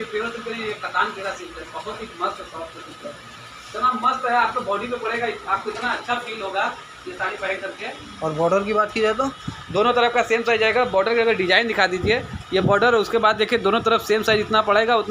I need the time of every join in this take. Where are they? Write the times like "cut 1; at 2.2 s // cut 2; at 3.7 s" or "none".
none